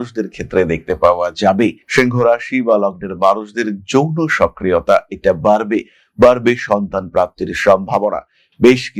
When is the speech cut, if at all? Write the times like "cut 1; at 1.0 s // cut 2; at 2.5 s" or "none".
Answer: none

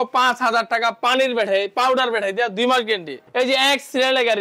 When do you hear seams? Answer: cut 1; at 3.2 s

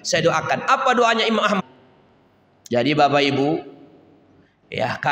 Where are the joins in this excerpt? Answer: cut 1; at 1.6 s

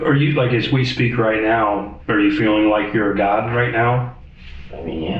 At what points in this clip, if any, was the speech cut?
cut 1; at 1.9 s

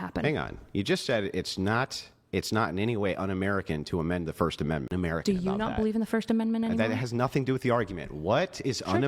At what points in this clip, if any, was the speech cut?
cut 1; at 4.9 s

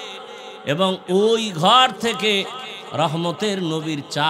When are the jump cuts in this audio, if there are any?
none

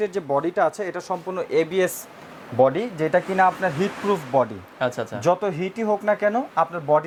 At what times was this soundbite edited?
none

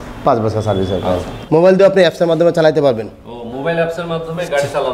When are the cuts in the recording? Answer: cut 1; at 1.3 s

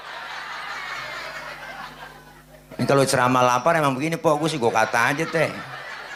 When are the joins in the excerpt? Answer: none

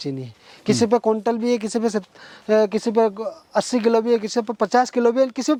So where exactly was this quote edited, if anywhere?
none

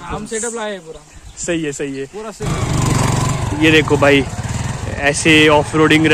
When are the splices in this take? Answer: cut 1; at 2.5 s

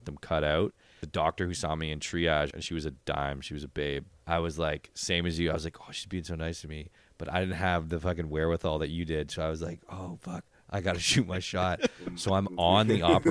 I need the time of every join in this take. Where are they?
cut 1; at 1.0 s // cut 2; at 2.5 s // cut 3; at 4.1 s

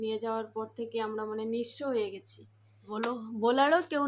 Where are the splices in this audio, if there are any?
cut 1; at 2.9 s

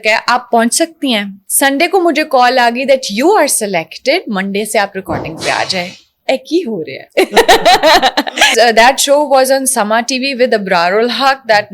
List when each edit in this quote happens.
cut 1; at 1.4 s // cut 2; at 8.5 s

